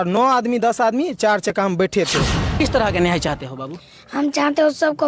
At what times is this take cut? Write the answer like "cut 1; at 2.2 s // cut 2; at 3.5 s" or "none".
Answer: cut 1; at 2.6 s